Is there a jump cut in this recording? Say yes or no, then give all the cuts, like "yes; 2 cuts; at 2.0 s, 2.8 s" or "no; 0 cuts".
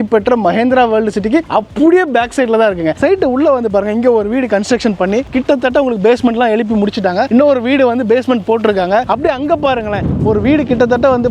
yes; 2 cuts; at 3.0 s, 7.3 s